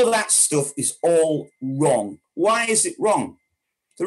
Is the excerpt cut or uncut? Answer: cut